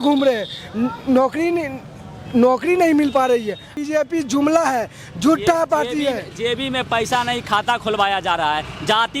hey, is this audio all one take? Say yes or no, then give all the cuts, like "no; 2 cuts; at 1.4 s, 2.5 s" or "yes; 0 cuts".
no; 1 cut; at 3.7 s